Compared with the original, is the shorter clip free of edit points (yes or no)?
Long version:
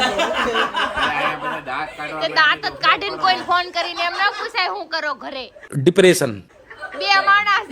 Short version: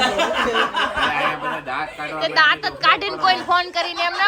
yes